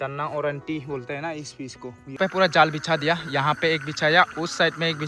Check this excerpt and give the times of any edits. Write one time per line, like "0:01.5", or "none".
0:02.2